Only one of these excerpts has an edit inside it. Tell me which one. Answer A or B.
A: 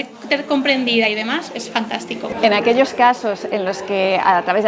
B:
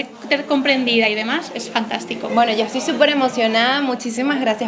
A